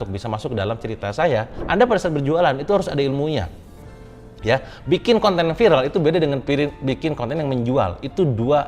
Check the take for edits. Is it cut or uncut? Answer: cut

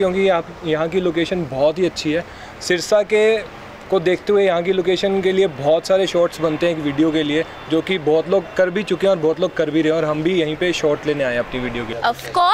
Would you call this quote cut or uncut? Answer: uncut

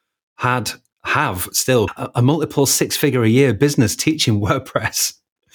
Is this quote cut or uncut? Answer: cut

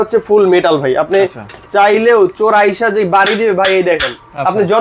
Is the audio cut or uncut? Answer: uncut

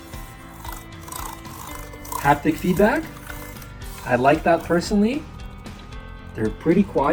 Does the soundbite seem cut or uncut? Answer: uncut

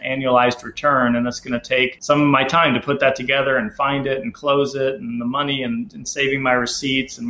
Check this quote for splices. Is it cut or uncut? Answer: cut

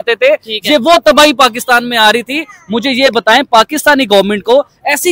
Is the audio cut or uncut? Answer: uncut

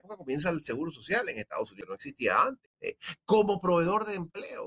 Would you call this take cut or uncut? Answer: cut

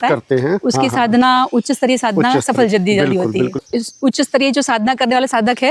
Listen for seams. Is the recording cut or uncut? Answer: cut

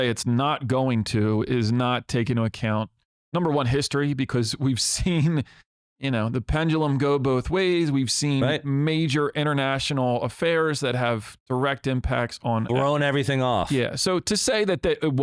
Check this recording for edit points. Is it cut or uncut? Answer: uncut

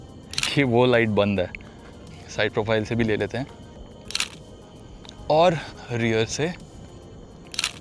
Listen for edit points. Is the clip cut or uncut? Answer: uncut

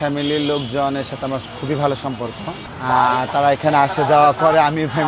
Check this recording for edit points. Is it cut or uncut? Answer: uncut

